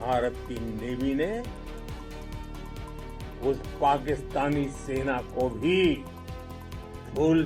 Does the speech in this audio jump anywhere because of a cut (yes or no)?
no